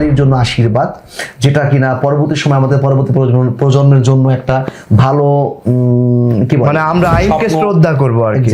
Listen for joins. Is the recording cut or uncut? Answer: uncut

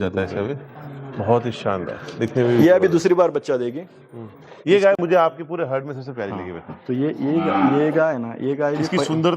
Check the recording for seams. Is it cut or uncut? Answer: uncut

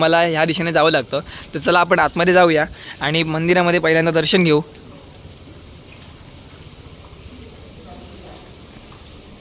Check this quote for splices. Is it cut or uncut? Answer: uncut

